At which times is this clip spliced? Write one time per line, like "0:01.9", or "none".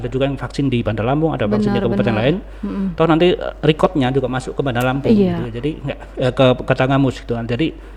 none